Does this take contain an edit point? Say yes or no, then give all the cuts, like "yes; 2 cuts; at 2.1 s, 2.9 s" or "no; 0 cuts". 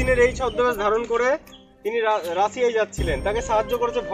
no; 0 cuts